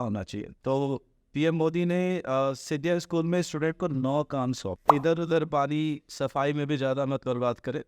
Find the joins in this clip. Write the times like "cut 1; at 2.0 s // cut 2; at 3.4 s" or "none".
cut 1; at 4.7 s